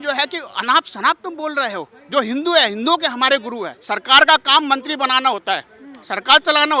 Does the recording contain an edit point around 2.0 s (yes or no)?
no